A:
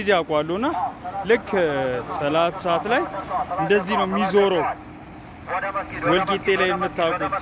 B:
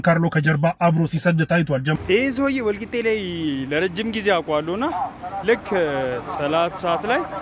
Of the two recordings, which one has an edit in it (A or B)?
B